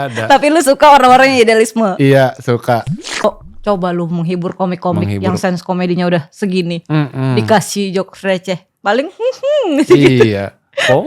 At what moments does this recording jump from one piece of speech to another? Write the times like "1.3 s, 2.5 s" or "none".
3.2 s